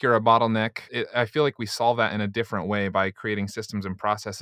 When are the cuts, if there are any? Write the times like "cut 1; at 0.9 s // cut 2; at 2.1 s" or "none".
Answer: cut 1; at 0.9 s